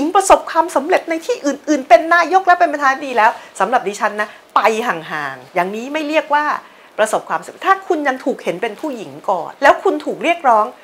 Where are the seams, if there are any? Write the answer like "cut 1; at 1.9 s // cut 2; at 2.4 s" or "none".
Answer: cut 1; at 5.4 s // cut 2; at 9.5 s